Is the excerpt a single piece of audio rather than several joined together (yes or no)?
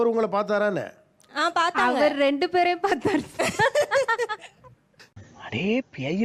yes